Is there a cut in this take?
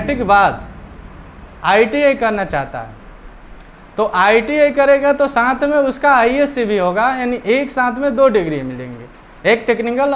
no; 0 cuts

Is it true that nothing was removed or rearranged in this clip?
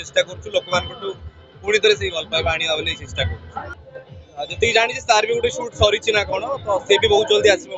no; 1 cut; at 3.7 s

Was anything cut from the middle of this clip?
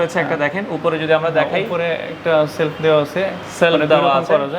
no; 0 cuts

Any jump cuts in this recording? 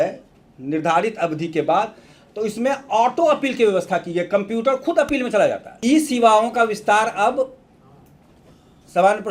yes; 1 cut; at 5.7 s

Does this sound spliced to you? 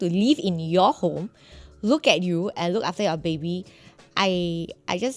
no; 0 cuts

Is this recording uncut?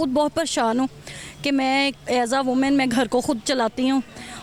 yes; 0 cuts

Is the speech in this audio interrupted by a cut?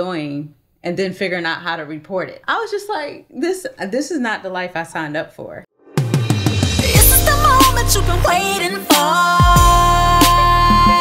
yes; 2 cuts; at 2.4 s, 5.4 s

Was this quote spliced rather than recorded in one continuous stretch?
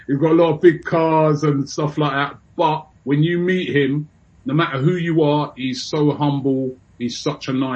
yes; 2 cuts; at 2.9 s, 6.9 s

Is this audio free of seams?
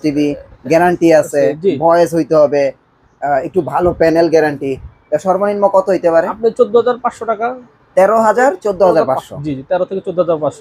yes; 0 cuts

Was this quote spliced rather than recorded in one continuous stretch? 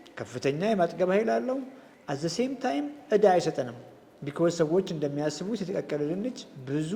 no; 0 cuts

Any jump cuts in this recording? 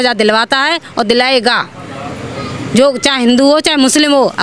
no; 0 cuts

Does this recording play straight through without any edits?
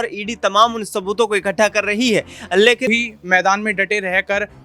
no; 1 cut; at 2.9 s

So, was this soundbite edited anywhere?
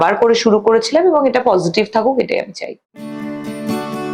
yes; 1 cut; at 3.2 s

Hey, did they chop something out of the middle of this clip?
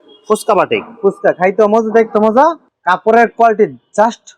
yes; 1 cut; at 2.7 s

